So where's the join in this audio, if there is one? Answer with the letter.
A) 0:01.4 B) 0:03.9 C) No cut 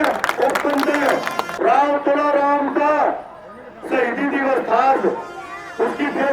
A